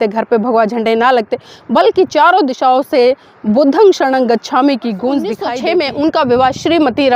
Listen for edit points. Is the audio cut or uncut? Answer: cut